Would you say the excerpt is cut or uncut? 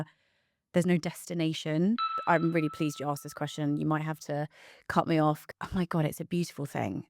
cut